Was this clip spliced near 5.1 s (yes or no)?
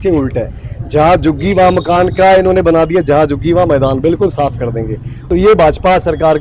yes